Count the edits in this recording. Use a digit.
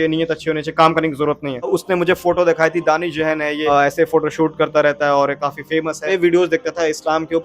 3